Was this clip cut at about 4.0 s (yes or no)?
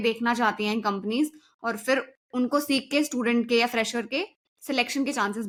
no